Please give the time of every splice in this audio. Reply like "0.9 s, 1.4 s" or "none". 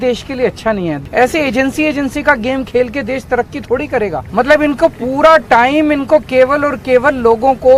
1.0 s, 4.2 s